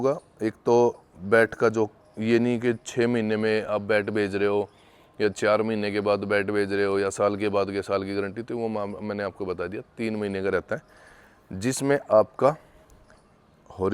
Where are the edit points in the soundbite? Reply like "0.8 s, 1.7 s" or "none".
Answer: none